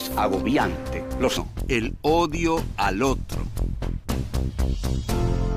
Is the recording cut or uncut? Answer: uncut